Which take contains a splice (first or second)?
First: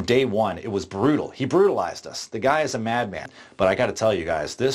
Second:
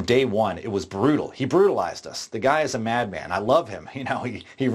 first